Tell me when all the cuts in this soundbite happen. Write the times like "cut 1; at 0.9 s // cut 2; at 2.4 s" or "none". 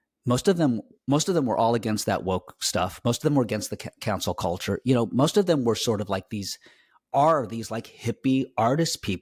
none